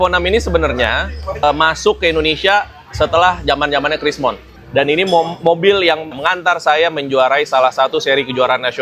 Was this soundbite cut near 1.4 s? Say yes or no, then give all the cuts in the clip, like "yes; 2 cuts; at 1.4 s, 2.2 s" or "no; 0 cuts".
yes; 3 cuts; at 1.4 s, 4.5 s, 6.2 s